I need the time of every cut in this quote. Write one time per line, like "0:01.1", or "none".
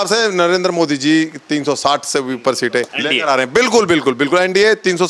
0:02.9